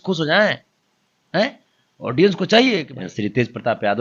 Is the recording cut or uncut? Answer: cut